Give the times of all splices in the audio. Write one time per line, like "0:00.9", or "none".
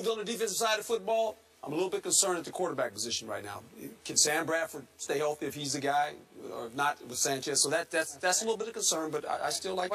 0:07.9